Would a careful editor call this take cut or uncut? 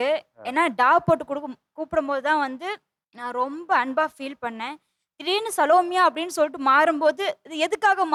uncut